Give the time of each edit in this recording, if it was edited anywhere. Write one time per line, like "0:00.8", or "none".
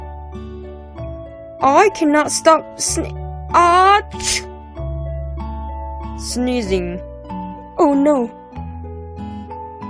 0:01.3